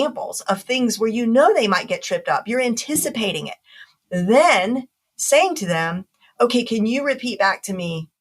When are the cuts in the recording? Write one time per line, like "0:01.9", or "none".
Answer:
0:03.9